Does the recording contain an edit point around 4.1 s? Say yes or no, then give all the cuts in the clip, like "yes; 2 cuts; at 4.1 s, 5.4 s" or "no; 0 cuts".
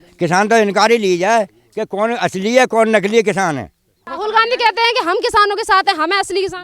yes; 1 cut; at 4.1 s